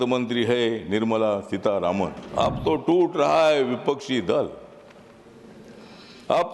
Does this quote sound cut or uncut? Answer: cut